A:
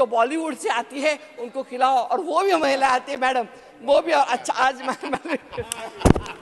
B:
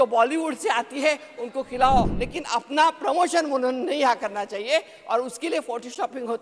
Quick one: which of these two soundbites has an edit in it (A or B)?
B